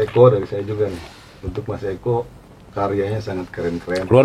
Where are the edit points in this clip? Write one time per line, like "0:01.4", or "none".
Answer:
none